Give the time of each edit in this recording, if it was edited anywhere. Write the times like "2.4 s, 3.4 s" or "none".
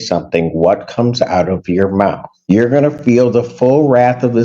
2.3 s